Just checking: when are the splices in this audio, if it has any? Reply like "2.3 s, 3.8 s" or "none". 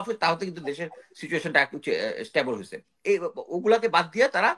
2.9 s